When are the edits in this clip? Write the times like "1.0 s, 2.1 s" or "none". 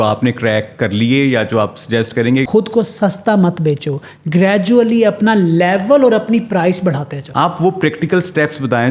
2.5 s, 7.2 s